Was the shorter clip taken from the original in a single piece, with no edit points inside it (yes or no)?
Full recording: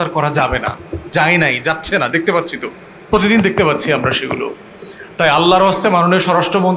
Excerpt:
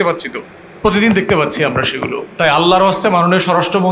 no